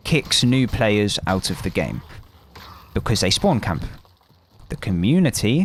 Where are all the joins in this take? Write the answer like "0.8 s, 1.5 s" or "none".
none